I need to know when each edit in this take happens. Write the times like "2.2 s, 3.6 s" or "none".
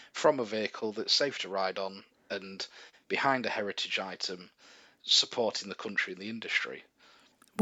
none

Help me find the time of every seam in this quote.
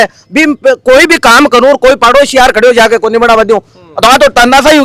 none

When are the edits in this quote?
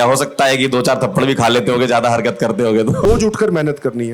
3.1 s

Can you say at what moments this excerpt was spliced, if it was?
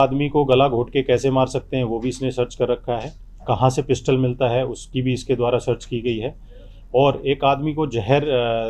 none

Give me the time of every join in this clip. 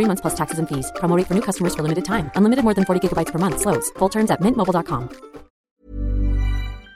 5.6 s

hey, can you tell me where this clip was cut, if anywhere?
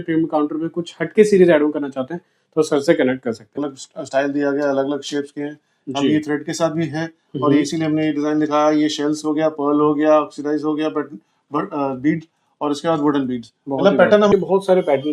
3.8 s, 14.3 s

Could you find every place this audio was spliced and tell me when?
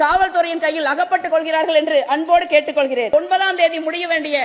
3.1 s

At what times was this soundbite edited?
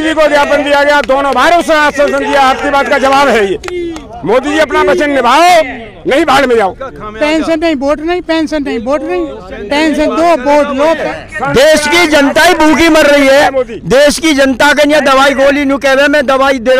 6.9 s, 9.5 s, 11.1 s

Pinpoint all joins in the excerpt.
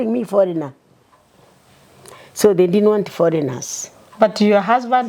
none

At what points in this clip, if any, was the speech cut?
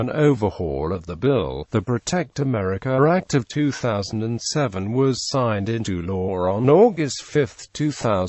none

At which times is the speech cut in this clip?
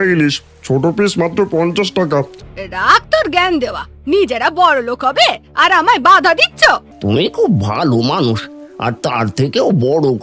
2.4 s, 6.9 s

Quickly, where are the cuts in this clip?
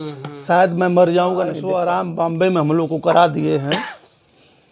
1.6 s

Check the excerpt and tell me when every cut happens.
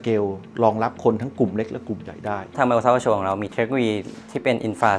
2.6 s

